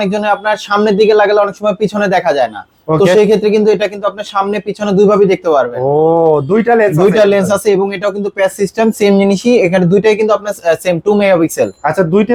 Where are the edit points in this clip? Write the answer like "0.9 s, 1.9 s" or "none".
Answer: none